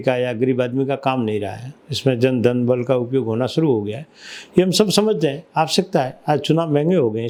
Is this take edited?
no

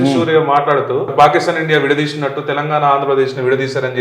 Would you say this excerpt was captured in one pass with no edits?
no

